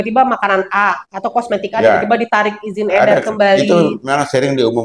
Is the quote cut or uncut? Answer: uncut